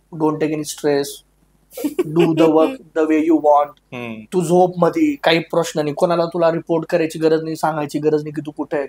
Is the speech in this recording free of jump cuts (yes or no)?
yes